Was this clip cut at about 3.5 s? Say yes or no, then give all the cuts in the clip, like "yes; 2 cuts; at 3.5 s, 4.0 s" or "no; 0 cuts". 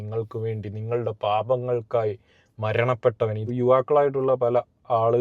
yes; 1 cut; at 3.5 s